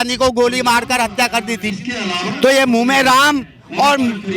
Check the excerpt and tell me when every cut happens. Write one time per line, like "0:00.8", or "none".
0:01.7